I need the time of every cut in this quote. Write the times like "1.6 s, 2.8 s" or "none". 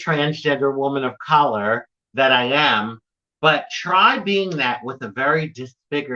none